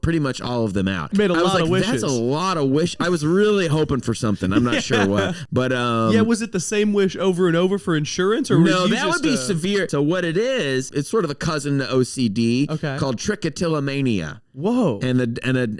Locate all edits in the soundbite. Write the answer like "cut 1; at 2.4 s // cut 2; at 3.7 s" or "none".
cut 1; at 1.1 s // cut 2; at 5.4 s // cut 3; at 9.9 s // cut 4; at 10.9 s